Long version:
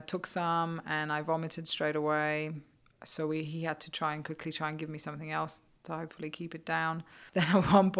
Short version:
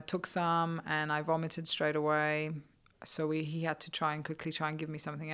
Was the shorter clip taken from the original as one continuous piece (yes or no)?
yes